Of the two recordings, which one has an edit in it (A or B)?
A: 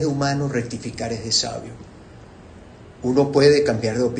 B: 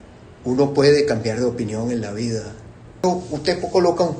B